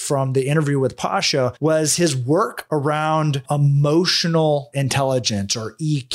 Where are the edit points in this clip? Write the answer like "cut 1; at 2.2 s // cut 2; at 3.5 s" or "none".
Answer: cut 1; at 4.7 s